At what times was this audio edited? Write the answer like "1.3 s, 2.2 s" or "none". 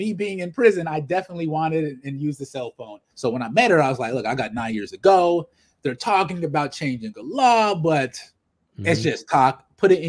3.0 s